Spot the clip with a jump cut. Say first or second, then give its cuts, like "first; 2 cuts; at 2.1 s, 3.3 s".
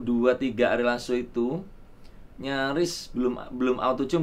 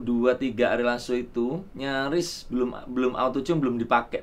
second; 1 cut; at 1.7 s